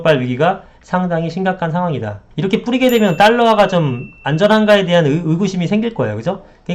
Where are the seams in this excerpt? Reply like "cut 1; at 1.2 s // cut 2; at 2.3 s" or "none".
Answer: cut 1; at 2.2 s